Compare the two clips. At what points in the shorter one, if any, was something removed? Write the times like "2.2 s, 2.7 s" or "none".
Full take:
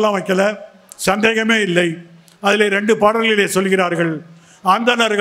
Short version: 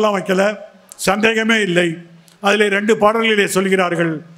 none